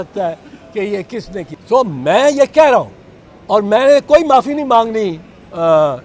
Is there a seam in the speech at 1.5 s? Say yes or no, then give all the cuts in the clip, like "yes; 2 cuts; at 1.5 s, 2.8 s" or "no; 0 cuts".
yes; 1 cut; at 1.5 s